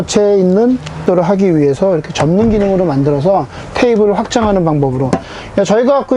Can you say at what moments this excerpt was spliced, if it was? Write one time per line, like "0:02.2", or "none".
0:01.0